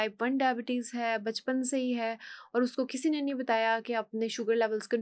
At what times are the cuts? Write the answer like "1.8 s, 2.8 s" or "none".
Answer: none